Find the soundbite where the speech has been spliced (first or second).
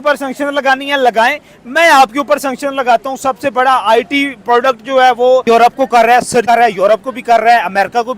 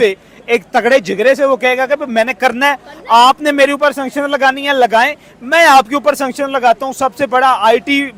first